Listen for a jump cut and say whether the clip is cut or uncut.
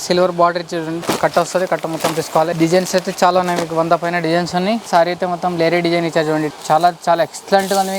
cut